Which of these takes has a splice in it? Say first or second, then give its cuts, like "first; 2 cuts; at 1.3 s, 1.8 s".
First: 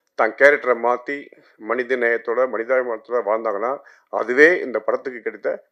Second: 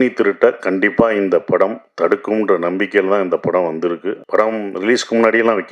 second; 1 cut; at 4.1 s